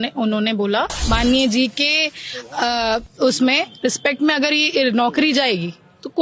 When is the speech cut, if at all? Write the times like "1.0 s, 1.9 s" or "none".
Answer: 1.0 s